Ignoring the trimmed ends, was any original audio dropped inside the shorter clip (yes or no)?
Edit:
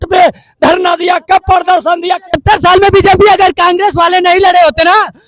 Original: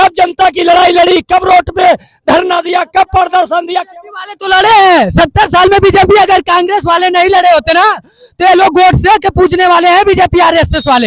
yes